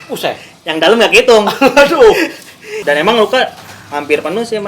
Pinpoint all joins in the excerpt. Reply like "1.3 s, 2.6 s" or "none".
2.7 s